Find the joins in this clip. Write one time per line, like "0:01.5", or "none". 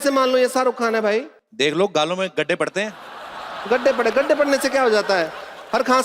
0:01.4